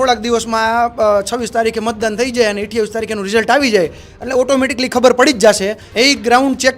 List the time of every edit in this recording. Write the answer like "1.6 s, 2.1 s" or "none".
5.8 s